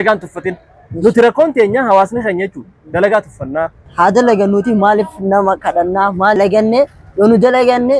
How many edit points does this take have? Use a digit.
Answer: 2